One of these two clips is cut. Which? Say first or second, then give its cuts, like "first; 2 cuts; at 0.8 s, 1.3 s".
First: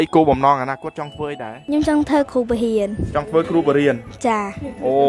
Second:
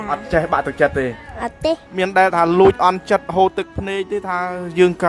second; 1 cut; at 1.9 s